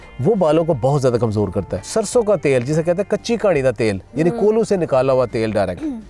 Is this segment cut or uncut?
cut